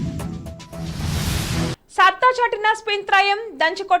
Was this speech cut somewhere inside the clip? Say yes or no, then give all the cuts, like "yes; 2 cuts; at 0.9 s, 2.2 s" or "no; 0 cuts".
yes; 1 cut; at 1.8 s